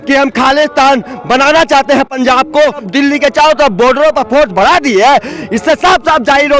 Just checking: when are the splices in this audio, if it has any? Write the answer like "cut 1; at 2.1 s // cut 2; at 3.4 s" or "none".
cut 1; at 2.8 s